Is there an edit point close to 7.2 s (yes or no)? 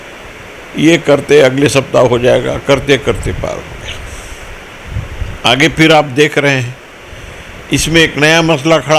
no